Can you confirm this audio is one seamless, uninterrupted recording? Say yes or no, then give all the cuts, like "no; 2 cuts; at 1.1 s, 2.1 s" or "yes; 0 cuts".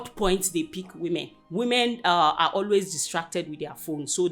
no; 1 cut; at 1.4 s